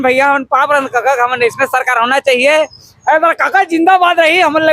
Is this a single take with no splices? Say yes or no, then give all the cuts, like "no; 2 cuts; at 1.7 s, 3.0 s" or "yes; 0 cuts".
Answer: yes; 0 cuts